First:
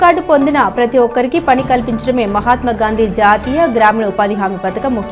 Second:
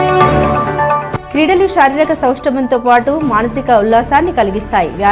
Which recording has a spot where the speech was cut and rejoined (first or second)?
second